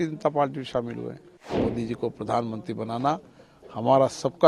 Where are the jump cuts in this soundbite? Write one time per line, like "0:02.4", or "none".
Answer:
0:01.6

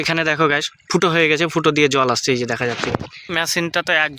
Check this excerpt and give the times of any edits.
0:03.2

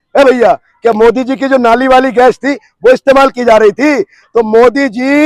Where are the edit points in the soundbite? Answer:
none

